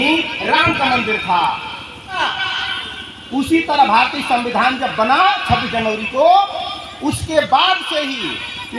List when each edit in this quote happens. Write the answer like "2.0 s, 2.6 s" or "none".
2.2 s